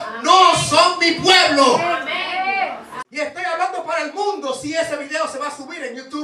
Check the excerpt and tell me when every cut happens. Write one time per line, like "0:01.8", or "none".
0:03.0